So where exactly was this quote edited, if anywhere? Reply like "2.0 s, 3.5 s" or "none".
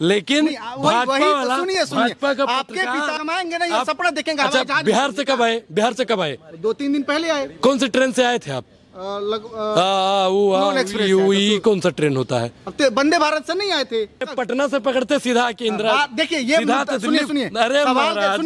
3.1 s, 14.3 s